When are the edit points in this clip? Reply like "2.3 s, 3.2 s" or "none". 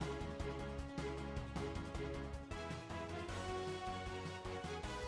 none

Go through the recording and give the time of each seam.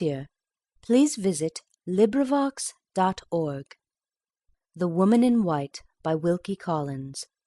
none

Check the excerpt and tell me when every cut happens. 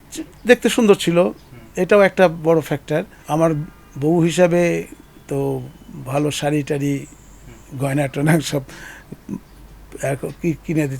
3.2 s

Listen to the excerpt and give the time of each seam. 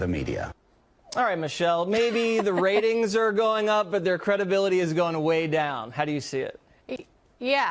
none

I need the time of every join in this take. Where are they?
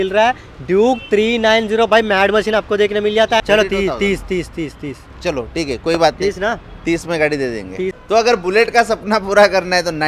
3.4 s, 8.0 s

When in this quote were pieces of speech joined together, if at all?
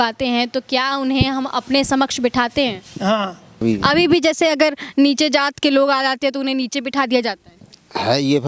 3.6 s

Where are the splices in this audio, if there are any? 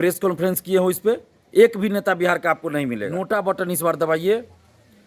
3.3 s

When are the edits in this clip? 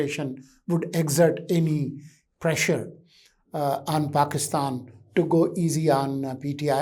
none

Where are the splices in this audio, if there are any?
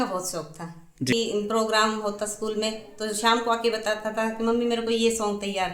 1.1 s

